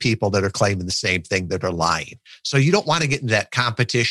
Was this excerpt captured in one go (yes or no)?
yes